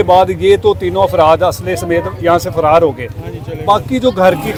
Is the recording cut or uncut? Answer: uncut